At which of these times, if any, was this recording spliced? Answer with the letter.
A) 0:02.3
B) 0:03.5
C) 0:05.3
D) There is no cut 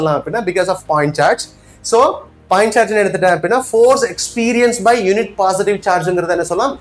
D